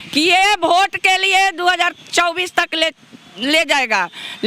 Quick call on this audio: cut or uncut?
uncut